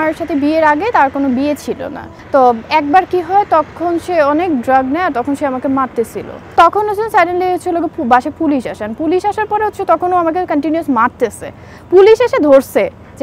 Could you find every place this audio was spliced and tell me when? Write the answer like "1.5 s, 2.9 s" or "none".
2.1 s, 6.5 s